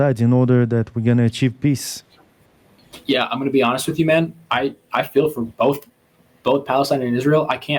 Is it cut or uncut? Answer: uncut